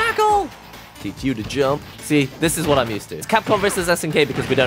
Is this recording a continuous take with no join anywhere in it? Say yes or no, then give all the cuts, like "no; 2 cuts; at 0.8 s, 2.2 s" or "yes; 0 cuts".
no; 2 cuts; at 1.9 s, 3.2 s